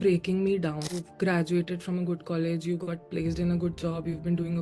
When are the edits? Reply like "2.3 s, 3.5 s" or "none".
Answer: 0.9 s